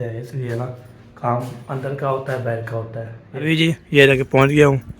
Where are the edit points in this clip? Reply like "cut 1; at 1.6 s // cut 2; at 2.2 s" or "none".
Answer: cut 1; at 3.3 s